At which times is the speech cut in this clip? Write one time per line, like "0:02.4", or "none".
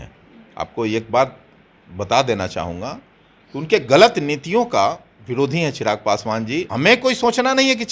0:06.6